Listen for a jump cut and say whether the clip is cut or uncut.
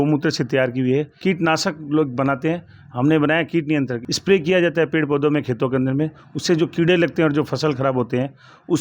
cut